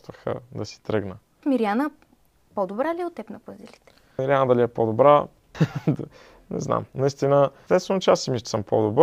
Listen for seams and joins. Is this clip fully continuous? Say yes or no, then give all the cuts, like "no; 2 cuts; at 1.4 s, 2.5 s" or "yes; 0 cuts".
no; 4 cuts; at 1.4 s, 4.2 s, 5.4 s, 7.6 s